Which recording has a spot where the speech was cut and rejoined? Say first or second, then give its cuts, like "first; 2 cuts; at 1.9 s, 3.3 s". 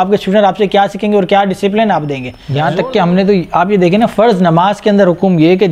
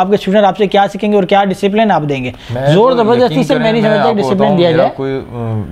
first; 1 cut; at 2.6 s